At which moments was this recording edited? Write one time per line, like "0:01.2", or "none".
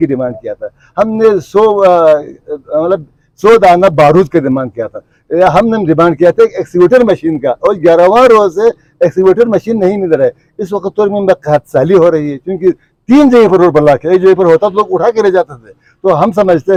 none